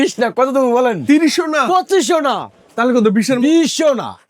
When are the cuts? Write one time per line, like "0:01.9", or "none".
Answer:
none